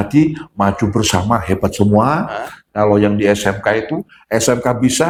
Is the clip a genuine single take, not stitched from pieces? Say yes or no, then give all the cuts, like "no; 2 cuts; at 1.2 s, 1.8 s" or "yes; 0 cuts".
yes; 0 cuts